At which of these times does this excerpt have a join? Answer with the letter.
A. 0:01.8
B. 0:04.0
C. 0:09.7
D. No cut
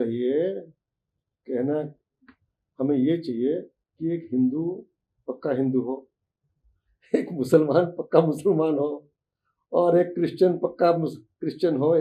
D